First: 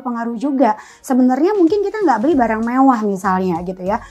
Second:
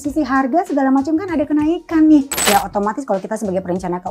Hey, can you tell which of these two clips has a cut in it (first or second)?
second